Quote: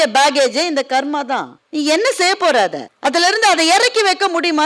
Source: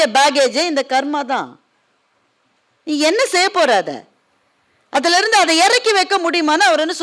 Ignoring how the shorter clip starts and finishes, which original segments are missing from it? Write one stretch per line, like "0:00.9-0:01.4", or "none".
0:01.6-0:02.7
0:04.0-0:04.8